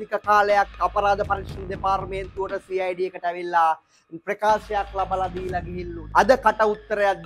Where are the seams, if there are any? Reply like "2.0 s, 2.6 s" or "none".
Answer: 6.1 s